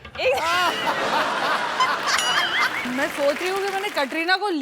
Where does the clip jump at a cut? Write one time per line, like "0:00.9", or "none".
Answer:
0:02.9